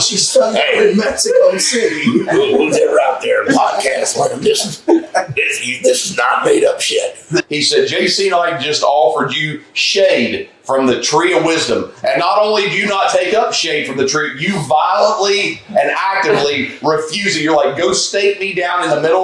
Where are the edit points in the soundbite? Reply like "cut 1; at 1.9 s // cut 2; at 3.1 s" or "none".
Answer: cut 1; at 7.5 s